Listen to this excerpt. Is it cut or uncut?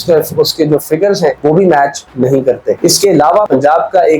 uncut